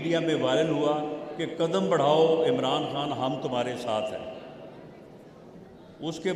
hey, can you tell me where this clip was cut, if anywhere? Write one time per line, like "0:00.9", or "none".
none